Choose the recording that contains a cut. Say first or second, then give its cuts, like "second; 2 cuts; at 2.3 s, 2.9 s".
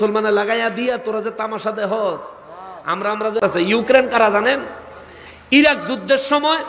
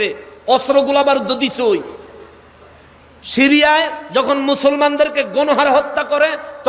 first; 1 cut; at 3.4 s